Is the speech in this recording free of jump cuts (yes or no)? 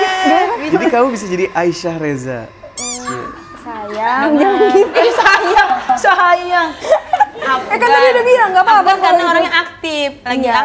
yes